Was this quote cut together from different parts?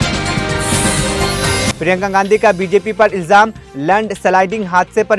no; 0 cuts

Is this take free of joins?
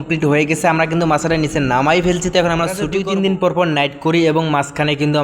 no; 1 cut; at 2.9 s

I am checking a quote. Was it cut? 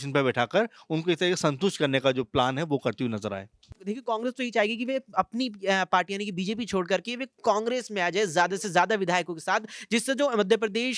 yes; 1 cut; at 3.7 s

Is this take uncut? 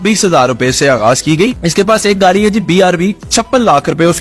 no; 1 cut; at 1.6 s

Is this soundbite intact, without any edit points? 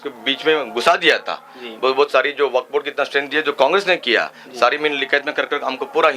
yes; 0 cuts

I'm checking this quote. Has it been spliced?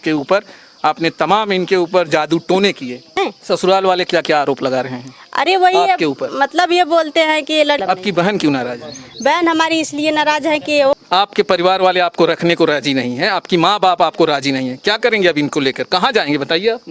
yes; 3 cuts; at 3.1 s, 7.8 s, 10.9 s

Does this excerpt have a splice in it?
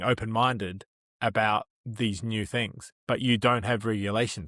no; 0 cuts

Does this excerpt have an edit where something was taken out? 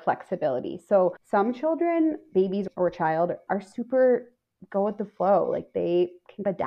yes; 1 cut; at 1.2 s

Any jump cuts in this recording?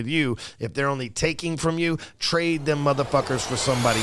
no; 0 cuts

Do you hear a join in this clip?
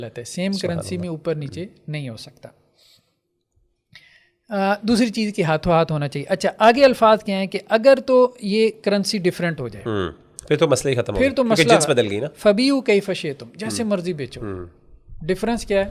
no; 0 cuts

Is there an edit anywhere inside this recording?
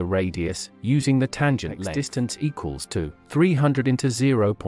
yes; 1 cut; at 1.9 s

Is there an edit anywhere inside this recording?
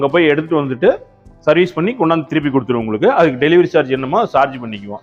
no; 0 cuts

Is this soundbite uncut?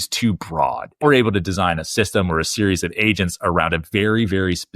no; 1 cut; at 1.0 s

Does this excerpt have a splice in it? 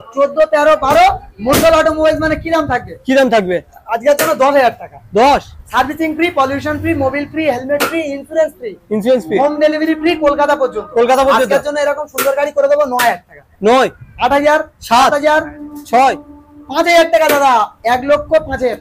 no; 0 cuts

